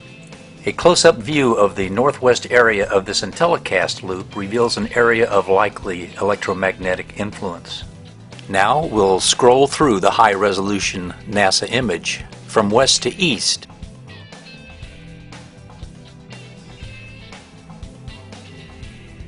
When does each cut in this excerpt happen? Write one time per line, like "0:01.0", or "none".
0:02.4